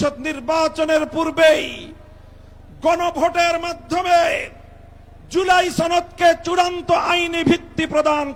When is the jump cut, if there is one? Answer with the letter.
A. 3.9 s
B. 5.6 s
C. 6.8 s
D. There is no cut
D